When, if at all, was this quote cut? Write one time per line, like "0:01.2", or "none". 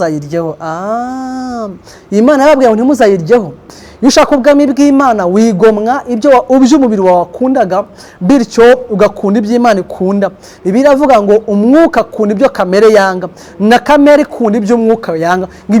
0:03.6